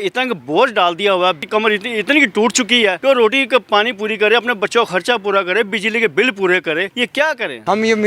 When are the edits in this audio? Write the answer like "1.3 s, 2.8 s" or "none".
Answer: 1.4 s, 3.0 s, 7.0 s